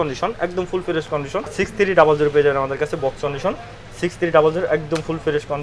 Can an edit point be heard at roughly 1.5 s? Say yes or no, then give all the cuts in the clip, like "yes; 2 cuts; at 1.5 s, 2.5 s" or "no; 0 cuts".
yes; 1 cut; at 1.5 s